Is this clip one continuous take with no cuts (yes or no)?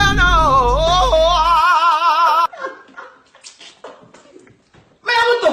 no